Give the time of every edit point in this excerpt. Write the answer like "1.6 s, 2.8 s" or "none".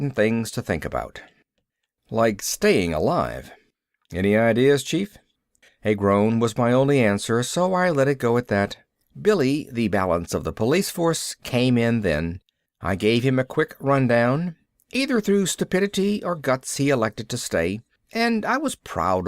4.1 s